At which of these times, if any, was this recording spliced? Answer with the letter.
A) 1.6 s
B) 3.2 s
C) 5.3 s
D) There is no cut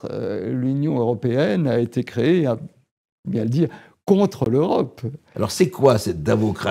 C